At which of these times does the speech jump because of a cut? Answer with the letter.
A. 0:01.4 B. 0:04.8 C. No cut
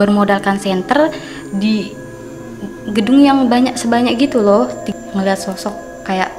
B